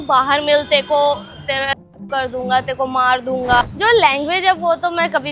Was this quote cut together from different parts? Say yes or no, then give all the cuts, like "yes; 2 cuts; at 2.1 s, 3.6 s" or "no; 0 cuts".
yes; 1 cut; at 3.6 s